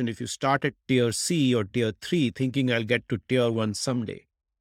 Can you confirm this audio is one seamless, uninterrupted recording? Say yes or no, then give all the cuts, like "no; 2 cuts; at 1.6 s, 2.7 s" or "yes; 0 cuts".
yes; 0 cuts